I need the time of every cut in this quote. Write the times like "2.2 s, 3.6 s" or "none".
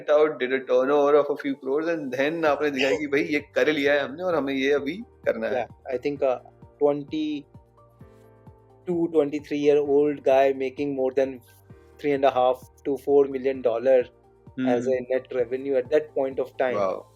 5.5 s